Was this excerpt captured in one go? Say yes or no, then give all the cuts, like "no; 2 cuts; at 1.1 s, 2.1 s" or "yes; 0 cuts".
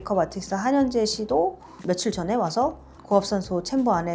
yes; 0 cuts